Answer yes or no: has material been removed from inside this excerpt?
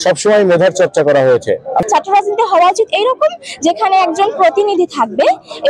yes